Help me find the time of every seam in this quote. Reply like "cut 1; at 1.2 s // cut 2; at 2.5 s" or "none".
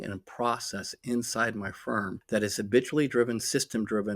cut 1; at 2.2 s